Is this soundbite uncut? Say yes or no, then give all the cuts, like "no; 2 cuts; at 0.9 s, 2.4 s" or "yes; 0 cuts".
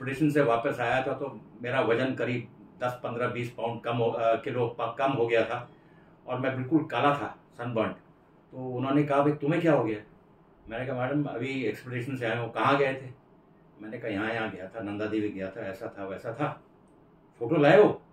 yes; 0 cuts